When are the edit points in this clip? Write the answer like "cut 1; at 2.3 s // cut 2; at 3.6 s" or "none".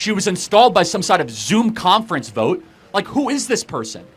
none